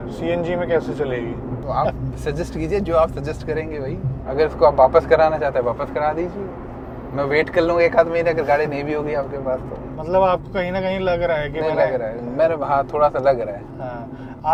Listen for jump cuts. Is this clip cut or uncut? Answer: uncut